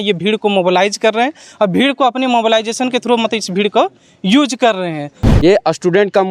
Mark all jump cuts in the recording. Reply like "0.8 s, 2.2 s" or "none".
5.2 s